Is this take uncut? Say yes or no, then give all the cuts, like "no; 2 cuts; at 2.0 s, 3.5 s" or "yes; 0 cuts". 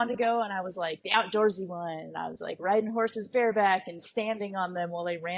yes; 0 cuts